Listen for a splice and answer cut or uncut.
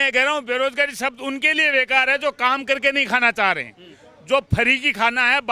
uncut